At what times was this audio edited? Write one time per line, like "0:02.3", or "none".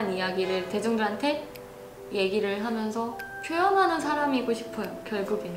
0:03.3